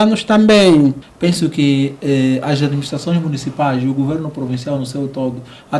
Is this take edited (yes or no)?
yes